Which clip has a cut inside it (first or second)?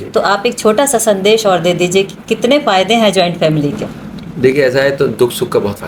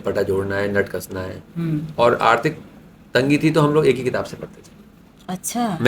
second